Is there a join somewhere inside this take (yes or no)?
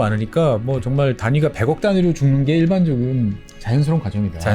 yes